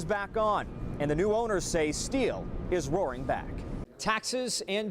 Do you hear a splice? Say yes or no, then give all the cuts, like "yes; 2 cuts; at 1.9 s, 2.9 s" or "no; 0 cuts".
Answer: yes; 1 cut; at 3.8 s